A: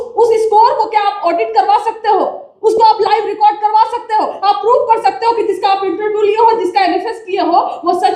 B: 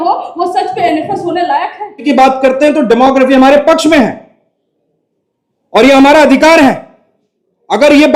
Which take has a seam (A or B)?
B